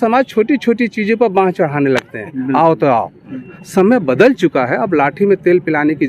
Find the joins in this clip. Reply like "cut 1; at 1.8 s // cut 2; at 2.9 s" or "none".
cut 1; at 3.4 s